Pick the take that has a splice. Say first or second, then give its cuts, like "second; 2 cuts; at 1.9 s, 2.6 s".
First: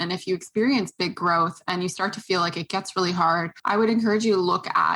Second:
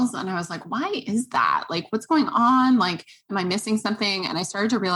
first; 1 cut; at 3.5 s